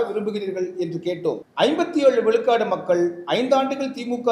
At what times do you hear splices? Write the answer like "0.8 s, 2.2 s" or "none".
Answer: 1.5 s